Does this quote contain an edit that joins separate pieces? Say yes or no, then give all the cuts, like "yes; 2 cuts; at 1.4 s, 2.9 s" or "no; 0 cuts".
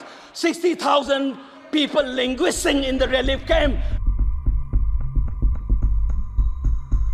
yes; 1 cut; at 3.9 s